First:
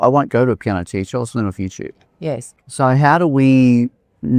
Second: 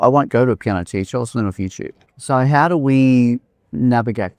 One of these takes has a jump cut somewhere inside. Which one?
second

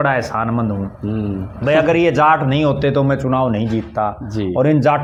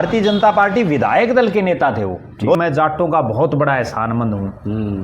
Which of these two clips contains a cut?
second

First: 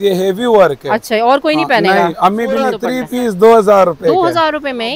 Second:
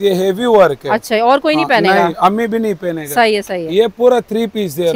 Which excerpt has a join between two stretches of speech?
first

